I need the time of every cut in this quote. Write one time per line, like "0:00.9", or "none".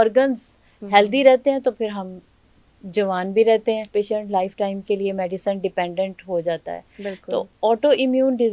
0:03.9